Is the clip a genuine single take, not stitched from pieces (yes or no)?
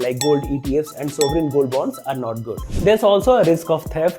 no